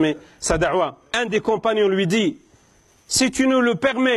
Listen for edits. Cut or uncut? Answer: cut